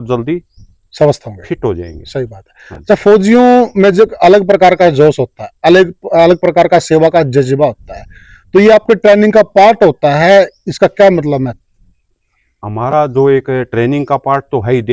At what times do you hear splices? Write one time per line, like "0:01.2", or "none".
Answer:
none

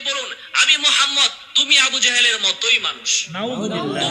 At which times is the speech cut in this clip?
0:02.7

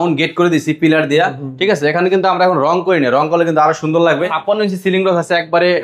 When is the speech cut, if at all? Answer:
0:04.4

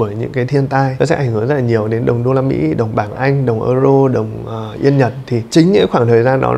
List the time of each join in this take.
0:00.9
0:05.5

